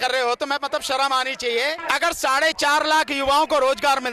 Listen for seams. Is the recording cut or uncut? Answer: cut